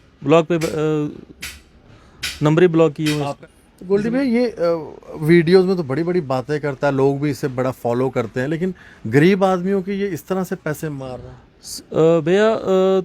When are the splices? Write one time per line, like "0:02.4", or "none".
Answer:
0:03.3